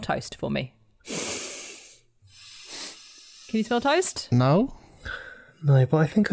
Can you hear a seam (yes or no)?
no